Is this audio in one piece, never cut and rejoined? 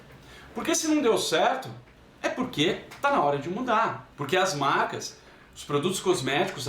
no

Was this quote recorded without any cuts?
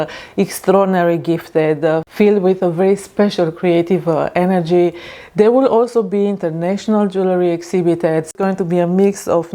yes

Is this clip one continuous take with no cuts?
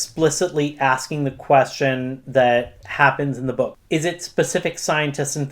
no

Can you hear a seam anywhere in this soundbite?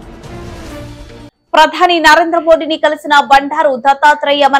yes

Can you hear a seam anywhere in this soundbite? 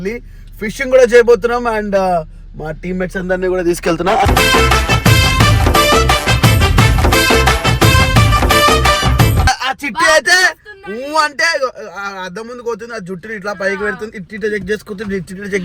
yes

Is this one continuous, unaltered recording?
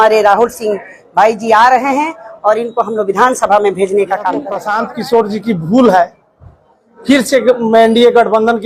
no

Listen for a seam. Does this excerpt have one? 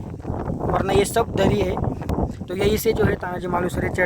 yes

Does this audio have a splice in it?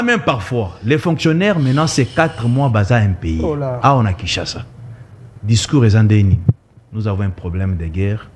no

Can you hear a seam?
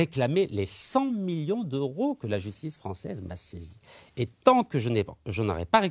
no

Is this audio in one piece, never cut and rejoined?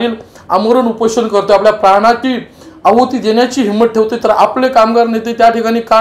no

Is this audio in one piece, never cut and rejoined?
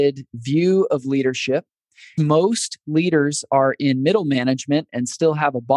no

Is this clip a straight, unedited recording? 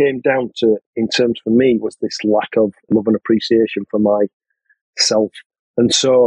no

